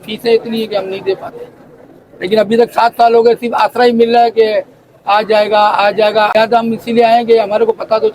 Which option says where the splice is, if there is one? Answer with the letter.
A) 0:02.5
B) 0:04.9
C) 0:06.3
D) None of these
C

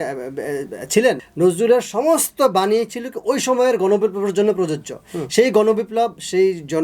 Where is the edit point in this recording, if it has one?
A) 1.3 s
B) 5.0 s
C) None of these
A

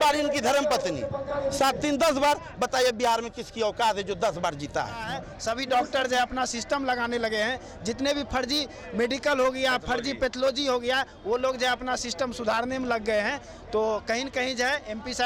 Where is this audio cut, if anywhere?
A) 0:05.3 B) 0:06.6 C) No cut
A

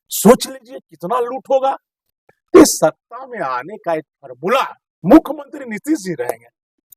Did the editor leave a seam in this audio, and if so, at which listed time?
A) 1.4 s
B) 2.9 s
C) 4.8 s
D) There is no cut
C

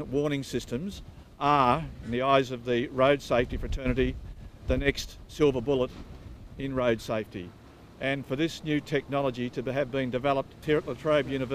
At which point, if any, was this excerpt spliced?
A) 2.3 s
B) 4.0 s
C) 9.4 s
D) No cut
B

